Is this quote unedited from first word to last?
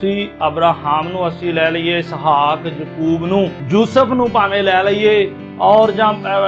no; 1 cut; at 3.6 s

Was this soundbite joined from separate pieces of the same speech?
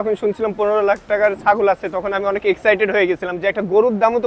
no; 0 cuts

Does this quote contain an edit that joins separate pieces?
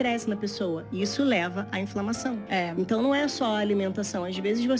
no; 0 cuts

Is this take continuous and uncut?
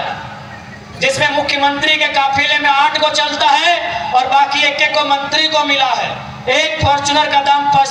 yes; 0 cuts

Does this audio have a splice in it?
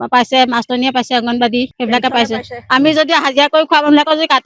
yes; 1 cut; at 1.7 s

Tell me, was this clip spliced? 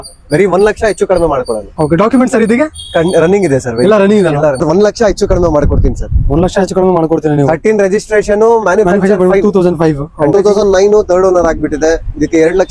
yes; 2 cuts; at 4.6 s, 10.3 s

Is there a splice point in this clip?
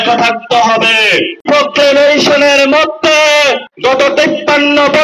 yes; 2 cuts; at 1.4 s, 3.7 s

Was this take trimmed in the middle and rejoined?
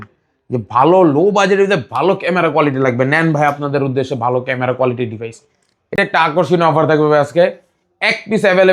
yes; 1 cut; at 6.0 s

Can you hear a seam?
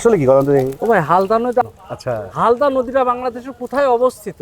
yes; 1 cut; at 1.6 s

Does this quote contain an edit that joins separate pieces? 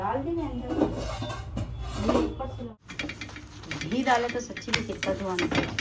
yes; 1 cut; at 2.6 s

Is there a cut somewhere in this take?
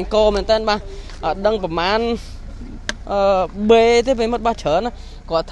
no; 0 cuts

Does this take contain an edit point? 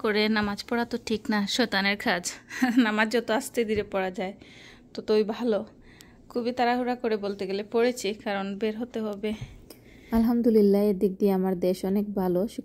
no; 0 cuts

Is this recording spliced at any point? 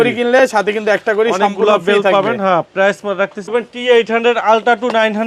yes; 1 cut; at 3.5 s

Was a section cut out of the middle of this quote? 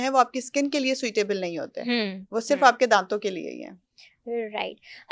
no; 0 cuts

